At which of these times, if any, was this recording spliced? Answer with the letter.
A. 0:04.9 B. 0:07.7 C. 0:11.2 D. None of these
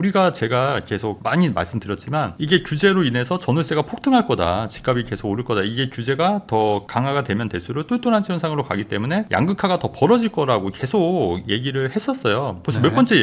D